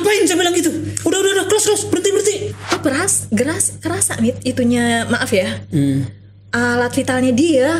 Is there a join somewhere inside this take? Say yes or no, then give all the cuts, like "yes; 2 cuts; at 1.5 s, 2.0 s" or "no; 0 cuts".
yes; 1 cut; at 2.8 s